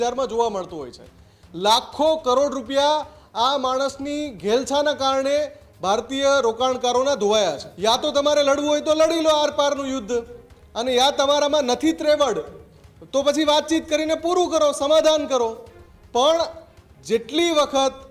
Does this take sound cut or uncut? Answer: cut